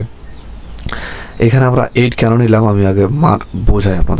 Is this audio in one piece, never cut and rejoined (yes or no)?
yes